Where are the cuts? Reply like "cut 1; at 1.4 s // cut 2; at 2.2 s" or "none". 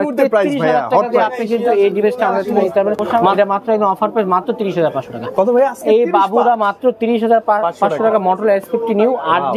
cut 1; at 3.0 s